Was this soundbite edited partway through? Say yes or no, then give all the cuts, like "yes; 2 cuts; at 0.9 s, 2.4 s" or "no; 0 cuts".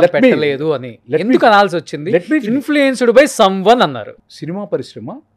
yes; 1 cut; at 4.2 s